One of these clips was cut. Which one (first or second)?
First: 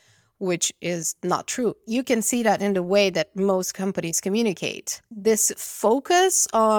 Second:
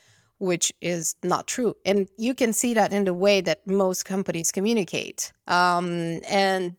first